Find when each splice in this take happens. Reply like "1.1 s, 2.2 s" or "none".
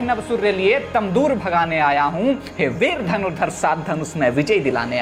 none